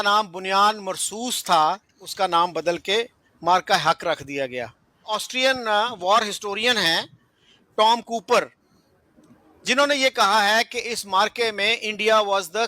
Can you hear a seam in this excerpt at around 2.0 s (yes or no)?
yes